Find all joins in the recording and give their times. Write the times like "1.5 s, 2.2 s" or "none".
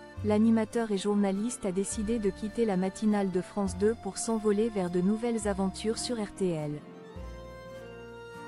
none